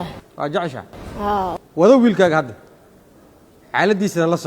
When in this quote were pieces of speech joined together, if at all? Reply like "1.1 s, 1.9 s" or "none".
1.5 s